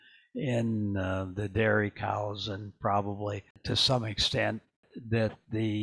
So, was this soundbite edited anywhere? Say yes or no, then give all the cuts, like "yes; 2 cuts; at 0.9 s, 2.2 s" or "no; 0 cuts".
yes; 2 cuts; at 3.5 s, 4.9 s